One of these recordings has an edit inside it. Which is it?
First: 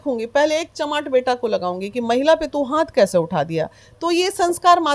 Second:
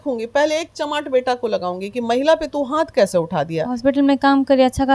second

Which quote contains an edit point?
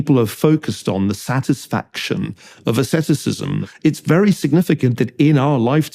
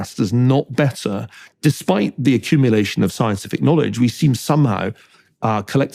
first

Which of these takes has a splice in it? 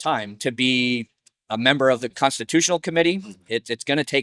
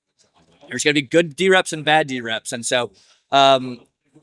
first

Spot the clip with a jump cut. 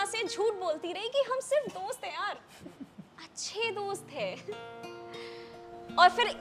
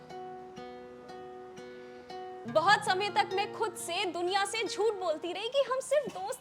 second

